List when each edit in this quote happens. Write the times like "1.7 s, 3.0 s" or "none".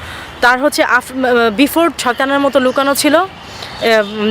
2.0 s